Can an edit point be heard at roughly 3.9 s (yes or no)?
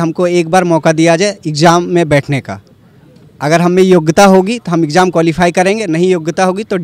no